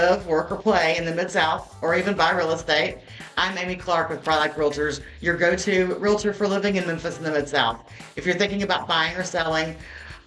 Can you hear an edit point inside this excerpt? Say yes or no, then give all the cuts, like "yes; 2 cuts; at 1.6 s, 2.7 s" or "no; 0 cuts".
no; 0 cuts